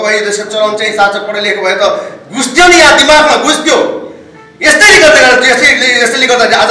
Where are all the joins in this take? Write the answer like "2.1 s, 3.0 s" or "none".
none